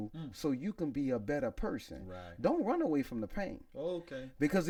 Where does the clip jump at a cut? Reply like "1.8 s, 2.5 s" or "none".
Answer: none